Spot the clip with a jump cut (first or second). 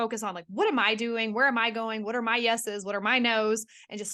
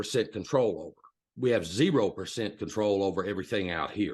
second